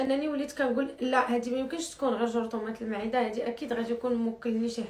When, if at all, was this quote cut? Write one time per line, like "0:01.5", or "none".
none